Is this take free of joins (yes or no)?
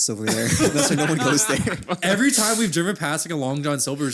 no